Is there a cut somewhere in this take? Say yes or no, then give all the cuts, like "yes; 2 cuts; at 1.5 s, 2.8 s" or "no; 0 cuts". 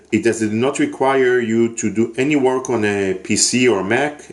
yes; 1 cut; at 2.7 s